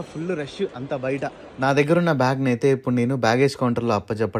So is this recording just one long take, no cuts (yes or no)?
yes